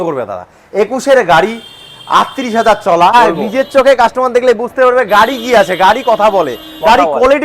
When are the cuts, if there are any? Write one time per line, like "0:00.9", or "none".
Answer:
0:03.1